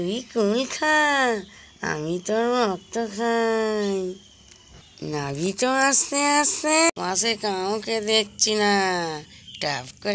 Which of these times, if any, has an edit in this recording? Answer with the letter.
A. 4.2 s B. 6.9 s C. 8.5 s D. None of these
B